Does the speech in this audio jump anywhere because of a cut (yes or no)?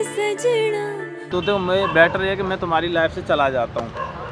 yes